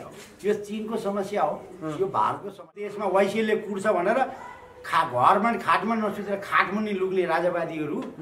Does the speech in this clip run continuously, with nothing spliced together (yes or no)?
no